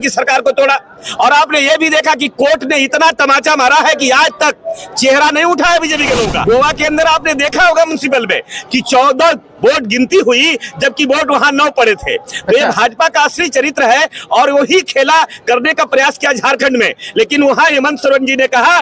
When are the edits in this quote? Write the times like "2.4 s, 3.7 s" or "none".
6.4 s